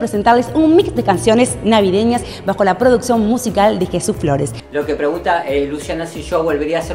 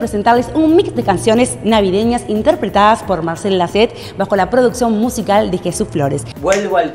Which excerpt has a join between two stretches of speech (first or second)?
first